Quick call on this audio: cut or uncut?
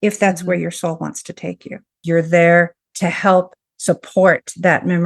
cut